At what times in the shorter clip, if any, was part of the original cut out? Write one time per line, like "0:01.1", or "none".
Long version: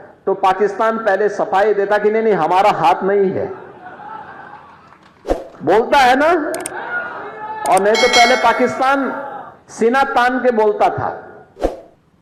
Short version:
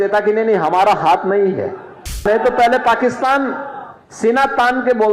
0:02.2